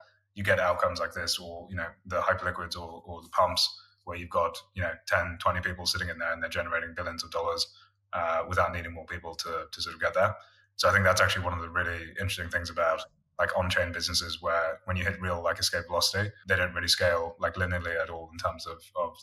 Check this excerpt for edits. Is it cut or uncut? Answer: cut